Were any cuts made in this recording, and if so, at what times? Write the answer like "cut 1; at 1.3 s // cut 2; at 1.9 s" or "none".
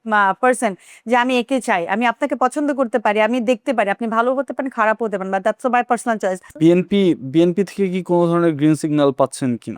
cut 1; at 6.5 s